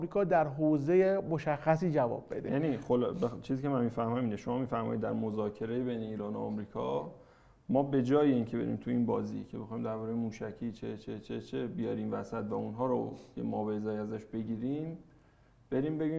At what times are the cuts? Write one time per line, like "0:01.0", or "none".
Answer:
none